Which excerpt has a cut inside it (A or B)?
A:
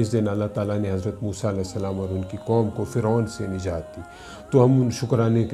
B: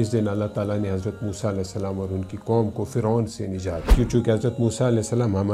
B